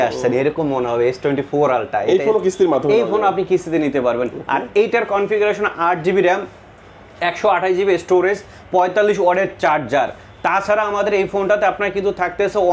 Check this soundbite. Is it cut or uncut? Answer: uncut